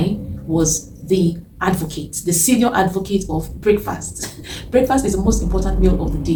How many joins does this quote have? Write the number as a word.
zero